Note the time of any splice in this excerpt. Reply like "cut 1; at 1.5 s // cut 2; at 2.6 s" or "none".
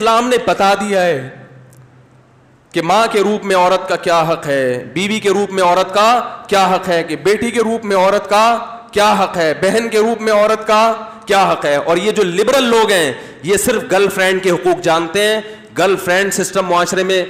none

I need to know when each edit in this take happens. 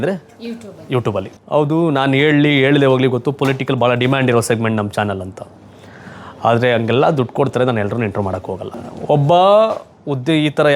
cut 1; at 1.3 s // cut 2; at 8.6 s

